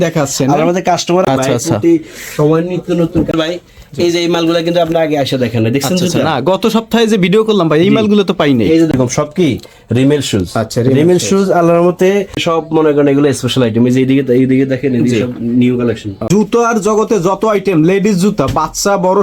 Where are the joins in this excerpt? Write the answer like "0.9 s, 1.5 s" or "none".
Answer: 1.3 s, 3.3 s, 8.9 s, 12.4 s, 16.3 s